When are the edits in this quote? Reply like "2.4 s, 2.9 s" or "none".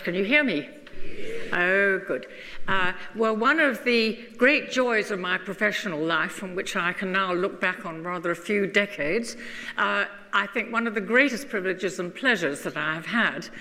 none